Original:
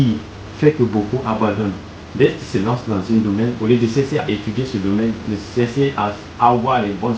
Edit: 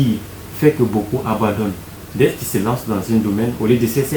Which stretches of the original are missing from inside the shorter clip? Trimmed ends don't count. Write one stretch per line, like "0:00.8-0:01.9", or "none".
none

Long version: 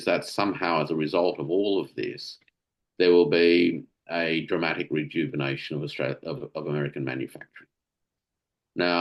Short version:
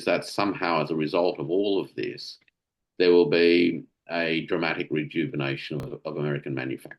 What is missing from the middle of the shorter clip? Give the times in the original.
0:05.9-0:06.4

